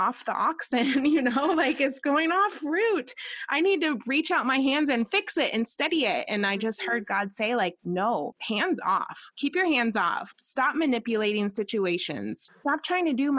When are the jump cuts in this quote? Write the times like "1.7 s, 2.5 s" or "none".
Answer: 8.2 s, 10.3 s, 12.4 s